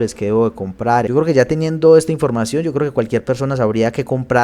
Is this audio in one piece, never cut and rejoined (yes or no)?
no